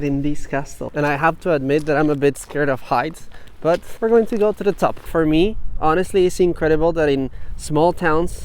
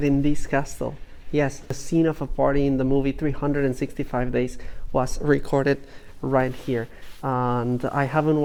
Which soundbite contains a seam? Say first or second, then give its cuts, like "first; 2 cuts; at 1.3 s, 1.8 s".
first; 3 cuts; at 0.9 s, 3.9 s, 5.1 s